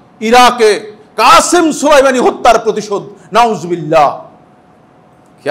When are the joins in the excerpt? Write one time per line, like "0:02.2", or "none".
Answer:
none